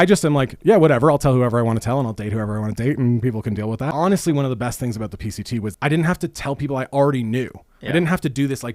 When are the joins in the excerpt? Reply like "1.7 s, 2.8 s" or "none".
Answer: 3.9 s, 5.7 s